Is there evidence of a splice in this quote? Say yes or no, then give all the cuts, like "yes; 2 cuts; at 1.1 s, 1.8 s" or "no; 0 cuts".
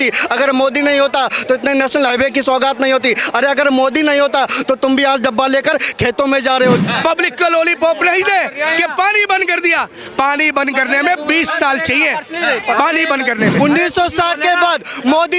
yes; 2 cuts; at 6.8 s, 13.5 s